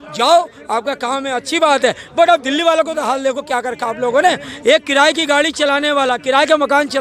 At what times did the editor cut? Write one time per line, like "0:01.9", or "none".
none